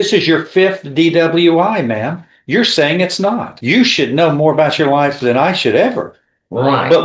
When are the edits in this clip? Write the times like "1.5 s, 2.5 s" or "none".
3.5 s